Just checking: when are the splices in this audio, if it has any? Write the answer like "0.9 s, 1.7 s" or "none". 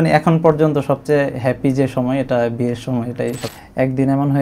3.4 s